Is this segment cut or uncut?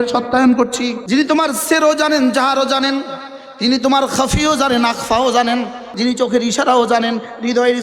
cut